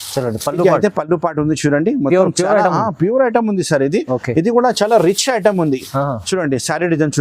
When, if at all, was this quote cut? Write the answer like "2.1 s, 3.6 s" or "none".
none